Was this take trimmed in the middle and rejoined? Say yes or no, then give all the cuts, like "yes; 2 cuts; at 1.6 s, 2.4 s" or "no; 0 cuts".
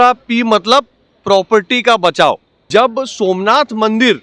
yes; 1 cut; at 2.5 s